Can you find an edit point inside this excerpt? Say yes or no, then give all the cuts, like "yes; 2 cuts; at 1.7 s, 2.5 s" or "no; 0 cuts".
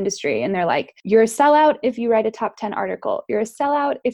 yes; 1 cut; at 0.9 s